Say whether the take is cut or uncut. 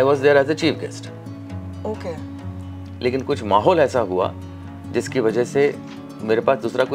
uncut